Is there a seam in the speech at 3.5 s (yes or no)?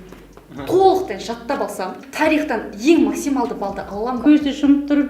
no